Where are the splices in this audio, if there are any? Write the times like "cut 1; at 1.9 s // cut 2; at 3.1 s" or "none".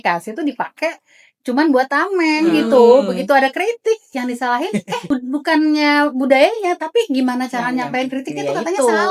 none